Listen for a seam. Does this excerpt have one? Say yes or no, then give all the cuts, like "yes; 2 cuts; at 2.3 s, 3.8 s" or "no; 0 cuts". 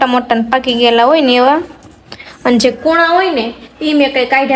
no; 0 cuts